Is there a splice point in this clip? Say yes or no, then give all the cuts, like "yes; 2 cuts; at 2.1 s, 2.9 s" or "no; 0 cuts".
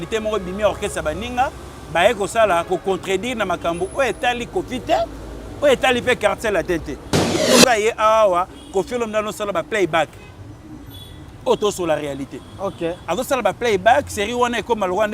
yes; 1 cut; at 7.4 s